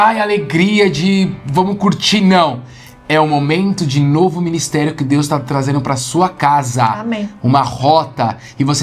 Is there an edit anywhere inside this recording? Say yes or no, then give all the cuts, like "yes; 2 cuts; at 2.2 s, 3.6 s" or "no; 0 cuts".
no; 0 cuts